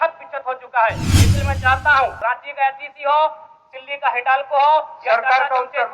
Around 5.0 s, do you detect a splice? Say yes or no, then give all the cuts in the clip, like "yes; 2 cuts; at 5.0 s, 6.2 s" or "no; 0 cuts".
no; 1 cut; at 2.2 s